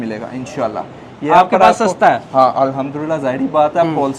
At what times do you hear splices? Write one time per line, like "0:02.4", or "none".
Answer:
none